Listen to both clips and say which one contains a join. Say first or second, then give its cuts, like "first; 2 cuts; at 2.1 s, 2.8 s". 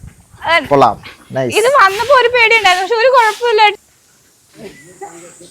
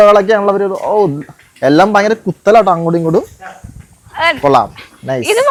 first; 1 cut; at 3.7 s